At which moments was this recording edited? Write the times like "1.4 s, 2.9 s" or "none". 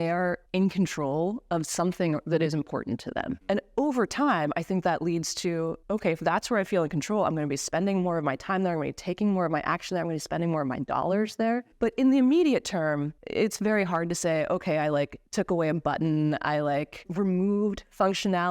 3.3 s